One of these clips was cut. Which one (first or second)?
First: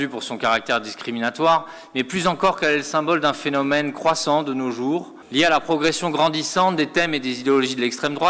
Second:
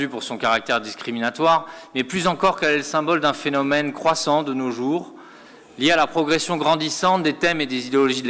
first